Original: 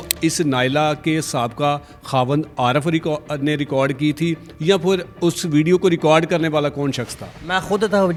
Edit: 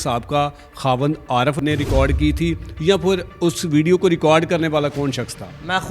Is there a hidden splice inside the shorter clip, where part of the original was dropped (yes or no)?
yes